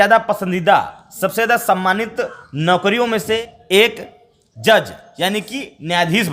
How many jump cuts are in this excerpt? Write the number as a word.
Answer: one